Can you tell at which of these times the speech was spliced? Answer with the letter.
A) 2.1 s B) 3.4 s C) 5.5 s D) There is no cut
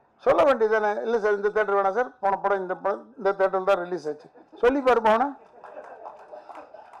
D